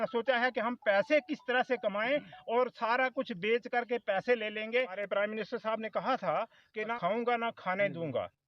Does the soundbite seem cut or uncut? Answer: cut